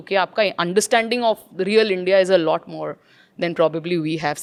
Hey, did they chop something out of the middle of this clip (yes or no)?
no